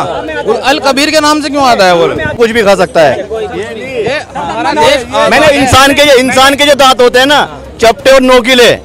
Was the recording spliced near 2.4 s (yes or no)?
yes